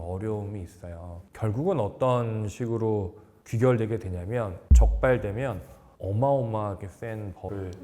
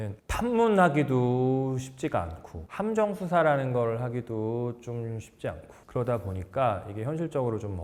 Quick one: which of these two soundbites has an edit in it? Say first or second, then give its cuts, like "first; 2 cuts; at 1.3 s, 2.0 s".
first; 2 cuts; at 1.2 s, 4.6 s